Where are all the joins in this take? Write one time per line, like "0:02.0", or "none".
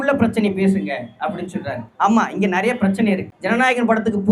0:01.8
0:03.3